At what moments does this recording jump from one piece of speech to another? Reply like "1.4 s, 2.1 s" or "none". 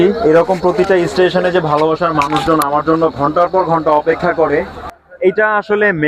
none